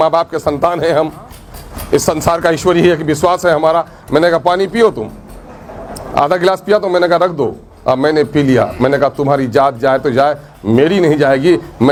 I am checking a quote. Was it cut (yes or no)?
no